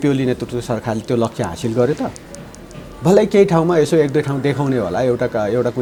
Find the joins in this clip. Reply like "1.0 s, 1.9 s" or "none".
none